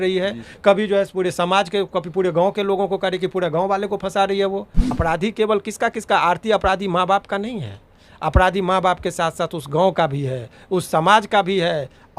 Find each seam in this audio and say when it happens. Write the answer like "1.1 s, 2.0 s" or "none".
4.8 s